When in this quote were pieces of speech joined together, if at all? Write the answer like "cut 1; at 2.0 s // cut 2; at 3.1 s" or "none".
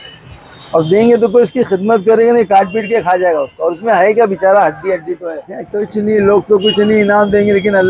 cut 1; at 5.5 s